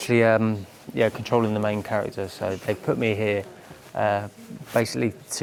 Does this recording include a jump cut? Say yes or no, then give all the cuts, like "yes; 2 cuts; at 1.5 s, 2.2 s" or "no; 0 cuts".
no; 0 cuts